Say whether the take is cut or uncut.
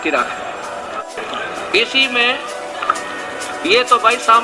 cut